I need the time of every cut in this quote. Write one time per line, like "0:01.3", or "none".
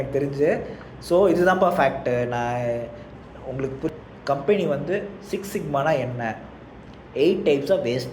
0:03.9